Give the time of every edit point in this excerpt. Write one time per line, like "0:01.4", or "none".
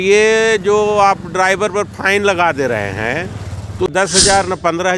0:03.9